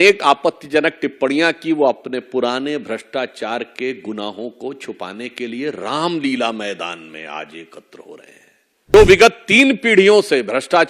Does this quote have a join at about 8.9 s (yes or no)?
yes